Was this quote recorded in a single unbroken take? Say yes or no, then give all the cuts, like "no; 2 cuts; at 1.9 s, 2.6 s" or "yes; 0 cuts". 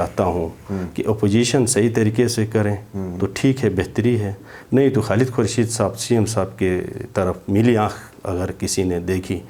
yes; 0 cuts